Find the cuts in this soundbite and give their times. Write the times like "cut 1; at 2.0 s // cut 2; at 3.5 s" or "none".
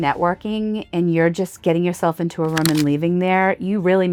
none